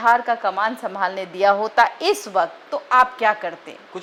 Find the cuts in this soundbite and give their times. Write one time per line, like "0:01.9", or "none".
none